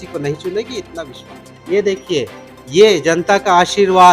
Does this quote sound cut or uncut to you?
cut